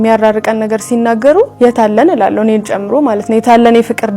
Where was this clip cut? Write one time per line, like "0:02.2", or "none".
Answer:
0:01.5